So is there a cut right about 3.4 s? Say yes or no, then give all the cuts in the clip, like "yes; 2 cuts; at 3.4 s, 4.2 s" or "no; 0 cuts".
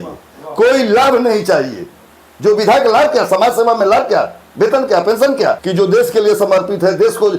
no; 1 cut; at 5.6 s